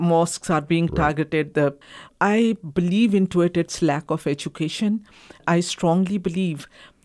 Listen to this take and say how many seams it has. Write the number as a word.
two